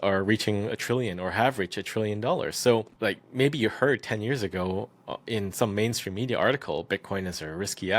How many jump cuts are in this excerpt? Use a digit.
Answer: 1